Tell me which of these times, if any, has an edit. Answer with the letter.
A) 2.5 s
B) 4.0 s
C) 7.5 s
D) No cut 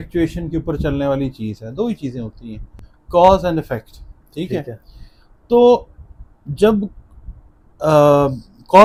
D